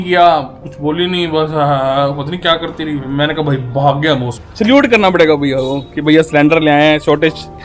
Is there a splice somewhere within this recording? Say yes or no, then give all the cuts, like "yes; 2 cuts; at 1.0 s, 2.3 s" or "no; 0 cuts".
yes; 1 cut; at 4.4 s